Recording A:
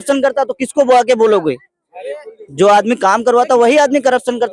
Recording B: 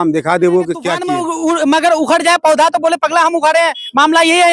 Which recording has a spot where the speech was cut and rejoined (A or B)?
B